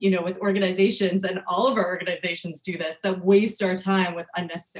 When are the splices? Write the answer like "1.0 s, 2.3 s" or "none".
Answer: none